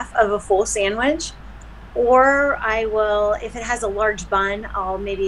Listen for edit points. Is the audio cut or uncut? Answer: uncut